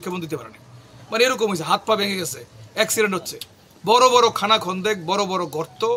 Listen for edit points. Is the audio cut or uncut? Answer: uncut